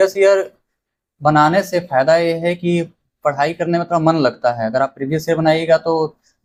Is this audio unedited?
yes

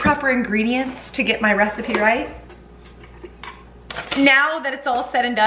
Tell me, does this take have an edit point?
yes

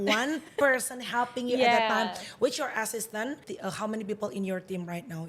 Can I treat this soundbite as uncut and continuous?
no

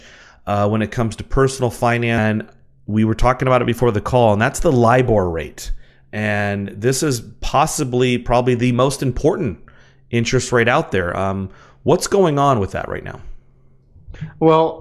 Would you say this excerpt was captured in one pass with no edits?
yes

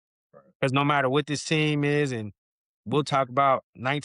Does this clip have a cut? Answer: no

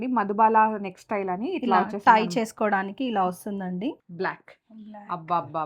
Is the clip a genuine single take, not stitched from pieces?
no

